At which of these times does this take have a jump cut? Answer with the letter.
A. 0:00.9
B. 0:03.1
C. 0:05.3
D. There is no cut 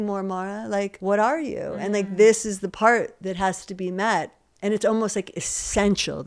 A